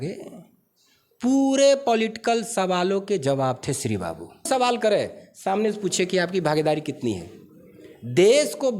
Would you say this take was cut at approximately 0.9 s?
no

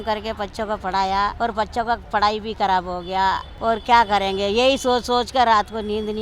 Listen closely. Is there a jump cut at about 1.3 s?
yes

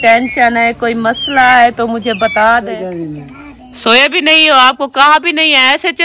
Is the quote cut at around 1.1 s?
no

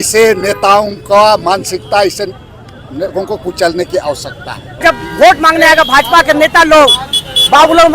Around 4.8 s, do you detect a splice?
yes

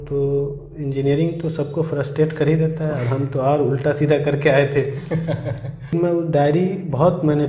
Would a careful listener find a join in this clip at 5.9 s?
yes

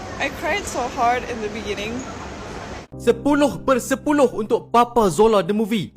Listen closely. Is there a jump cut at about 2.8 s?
yes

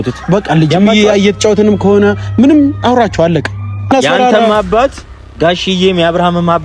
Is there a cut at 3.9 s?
yes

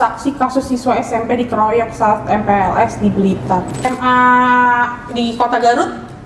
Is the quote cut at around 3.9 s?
yes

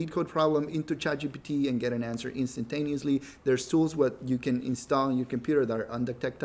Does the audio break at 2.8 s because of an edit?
no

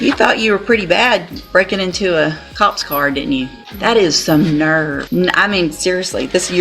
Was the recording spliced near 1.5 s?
no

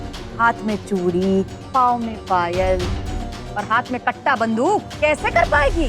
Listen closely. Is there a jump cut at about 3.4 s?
no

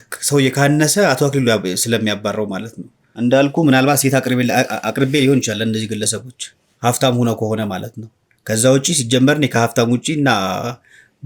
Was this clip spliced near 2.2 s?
no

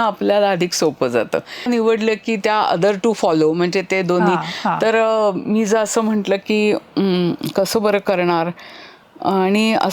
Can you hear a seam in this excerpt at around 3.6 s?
no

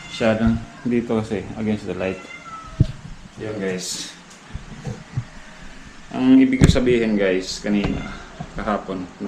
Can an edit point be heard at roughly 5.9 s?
no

